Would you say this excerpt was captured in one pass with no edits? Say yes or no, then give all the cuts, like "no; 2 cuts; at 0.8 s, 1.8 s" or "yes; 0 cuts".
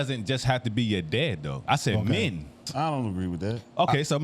no; 1 cut; at 2.6 s